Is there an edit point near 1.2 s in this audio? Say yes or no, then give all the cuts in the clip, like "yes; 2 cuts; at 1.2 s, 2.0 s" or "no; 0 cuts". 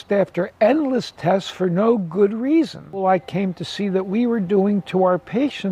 no; 1 cut; at 3.0 s